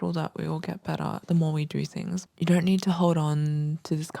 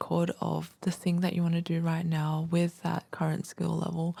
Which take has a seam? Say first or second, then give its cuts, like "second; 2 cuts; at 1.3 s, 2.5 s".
first; 2 cuts; at 1.2 s, 2.3 s